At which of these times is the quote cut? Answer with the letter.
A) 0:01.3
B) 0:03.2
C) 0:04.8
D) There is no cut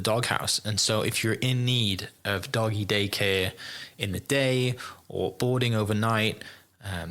D